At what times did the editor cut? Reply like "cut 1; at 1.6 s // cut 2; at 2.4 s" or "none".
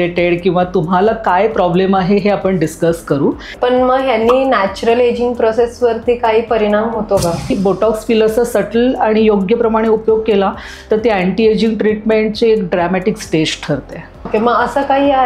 cut 1; at 3.5 s // cut 2; at 7.5 s // cut 3; at 14.3 s